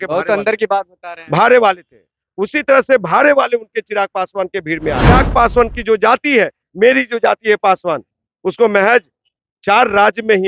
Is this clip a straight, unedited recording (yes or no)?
no